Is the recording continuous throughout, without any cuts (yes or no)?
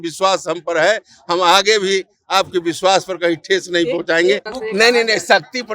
no